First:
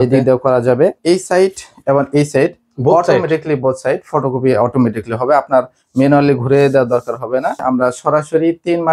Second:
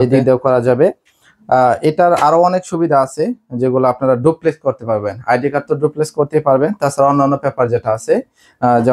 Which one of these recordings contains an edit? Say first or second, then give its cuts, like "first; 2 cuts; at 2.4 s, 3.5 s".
first; 2 cuts; at 1.0 s, 7.6 s